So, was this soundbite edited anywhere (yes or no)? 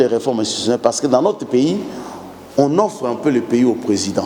no